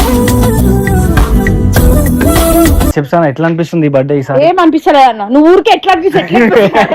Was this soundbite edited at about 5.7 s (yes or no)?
no